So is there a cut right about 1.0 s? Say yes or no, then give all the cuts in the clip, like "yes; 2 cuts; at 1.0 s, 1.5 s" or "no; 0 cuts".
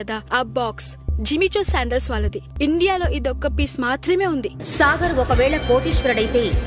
no; 2 cuts; at 2.4 s, 4.6 s